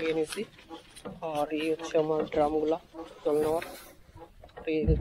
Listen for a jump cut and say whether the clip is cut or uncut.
uncut